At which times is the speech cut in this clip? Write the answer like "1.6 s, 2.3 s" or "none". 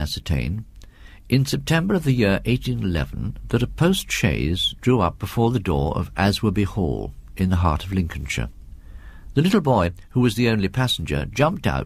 none